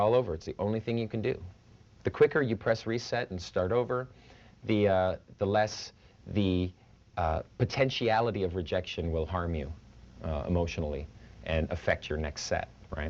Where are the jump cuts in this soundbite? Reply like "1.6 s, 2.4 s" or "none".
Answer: 10.6 s